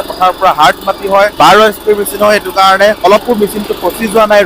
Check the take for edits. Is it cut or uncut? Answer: cut